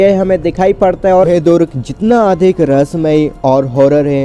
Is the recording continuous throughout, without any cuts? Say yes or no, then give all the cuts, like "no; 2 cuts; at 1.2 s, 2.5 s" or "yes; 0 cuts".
no; 1 cut; at 1.3 s